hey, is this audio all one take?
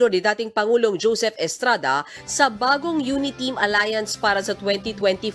no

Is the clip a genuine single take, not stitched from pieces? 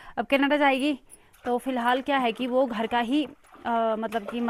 yes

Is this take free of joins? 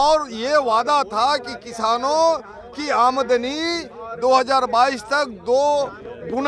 yes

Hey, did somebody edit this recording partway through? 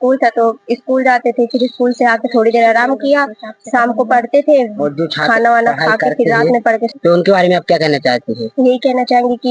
yes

